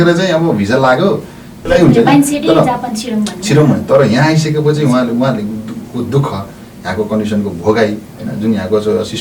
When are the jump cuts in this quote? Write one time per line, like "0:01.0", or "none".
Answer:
0:01.5